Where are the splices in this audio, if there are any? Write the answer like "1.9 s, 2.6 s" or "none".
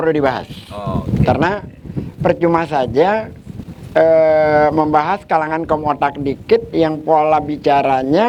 none